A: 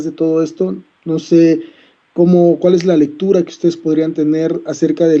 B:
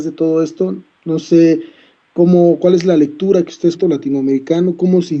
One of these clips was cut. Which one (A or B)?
A